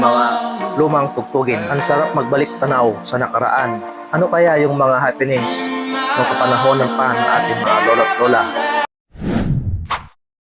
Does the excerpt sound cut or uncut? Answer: cut